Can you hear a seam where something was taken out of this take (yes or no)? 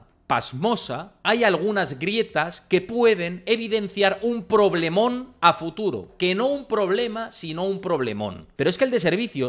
yes